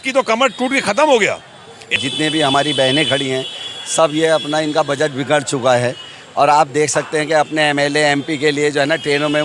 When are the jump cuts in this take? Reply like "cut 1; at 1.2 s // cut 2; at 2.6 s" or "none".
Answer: cut 1; at 1.9 s